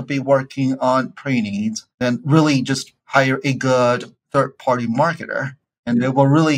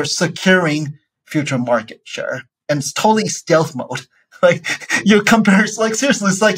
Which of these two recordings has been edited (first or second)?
first